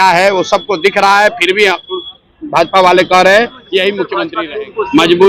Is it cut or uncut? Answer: cut